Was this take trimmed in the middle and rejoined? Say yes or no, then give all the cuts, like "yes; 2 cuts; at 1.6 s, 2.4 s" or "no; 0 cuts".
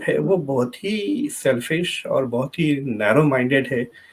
no; 0 cuts